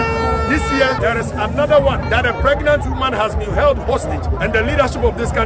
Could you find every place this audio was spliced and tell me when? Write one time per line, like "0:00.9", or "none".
0:01.0
0:02.0
0:04.3